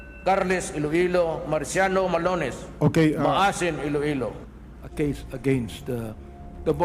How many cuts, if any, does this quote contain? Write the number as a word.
one